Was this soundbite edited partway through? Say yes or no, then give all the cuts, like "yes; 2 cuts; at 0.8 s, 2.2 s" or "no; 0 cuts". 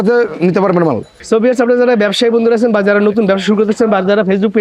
yes; 1 cut; at 1.2 s